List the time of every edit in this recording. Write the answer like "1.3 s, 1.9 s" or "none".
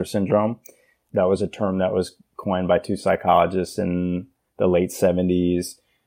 1.0 s